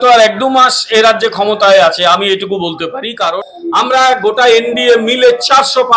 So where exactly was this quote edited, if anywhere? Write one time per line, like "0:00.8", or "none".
0:03.4

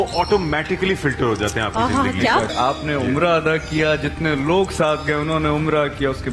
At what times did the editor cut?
0:02.5

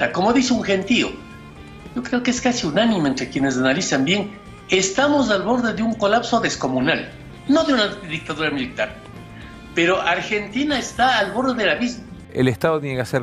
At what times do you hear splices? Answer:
0:12.1

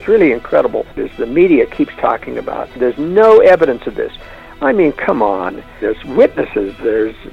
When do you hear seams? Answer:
0:01.0
0:02.8
0:05.8

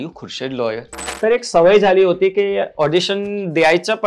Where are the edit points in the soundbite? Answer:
0:01.0

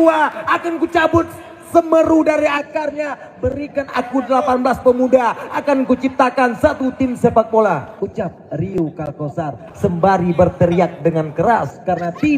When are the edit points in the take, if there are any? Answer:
none

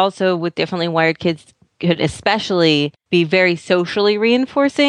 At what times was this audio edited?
0:03.0

